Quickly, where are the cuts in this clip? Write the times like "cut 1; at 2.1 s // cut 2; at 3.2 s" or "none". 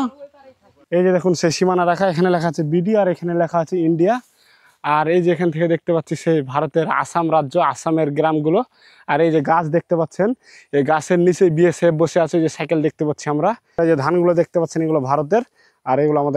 cut 1; at 1.0 s // cut 2; at 13.8 s